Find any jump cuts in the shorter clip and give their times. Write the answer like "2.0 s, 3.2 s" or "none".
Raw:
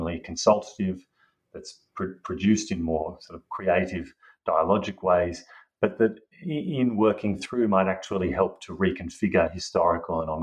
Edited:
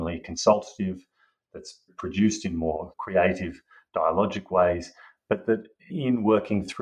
1.9 s, 2.9 s, 5.9 s